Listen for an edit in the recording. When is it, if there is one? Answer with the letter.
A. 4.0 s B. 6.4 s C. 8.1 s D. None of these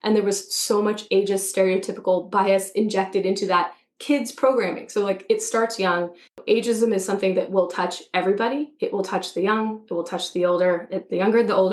B